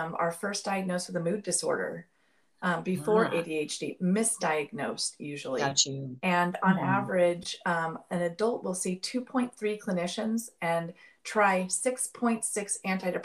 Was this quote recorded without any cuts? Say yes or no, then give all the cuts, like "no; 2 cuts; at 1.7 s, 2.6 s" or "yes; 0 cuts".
yes; 0 cuts